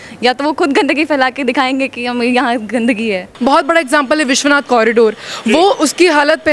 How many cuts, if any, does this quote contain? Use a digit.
1